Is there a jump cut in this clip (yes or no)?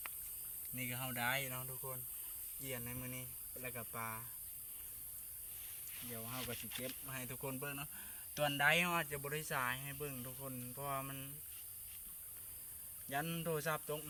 no